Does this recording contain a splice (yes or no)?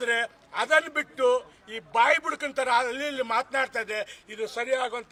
no